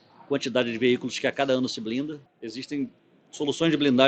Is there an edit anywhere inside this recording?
yes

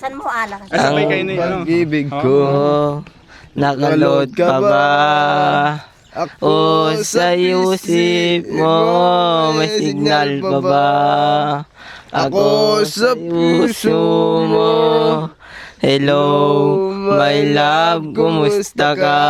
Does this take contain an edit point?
no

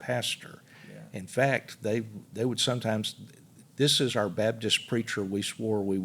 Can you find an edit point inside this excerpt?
no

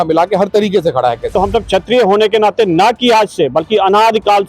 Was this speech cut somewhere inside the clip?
yes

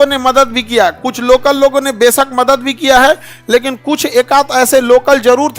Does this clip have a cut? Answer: no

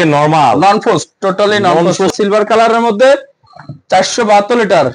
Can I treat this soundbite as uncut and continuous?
no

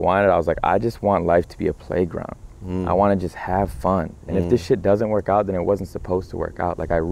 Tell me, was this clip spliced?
no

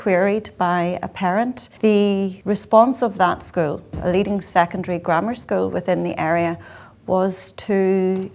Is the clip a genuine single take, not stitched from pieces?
no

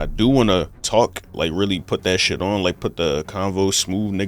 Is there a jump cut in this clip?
yes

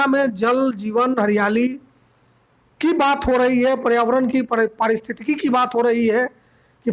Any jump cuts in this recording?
no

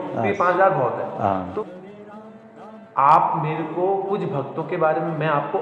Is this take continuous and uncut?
no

